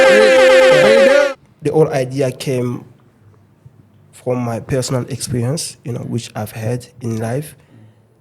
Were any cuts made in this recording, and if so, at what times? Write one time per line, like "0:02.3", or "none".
0:01.3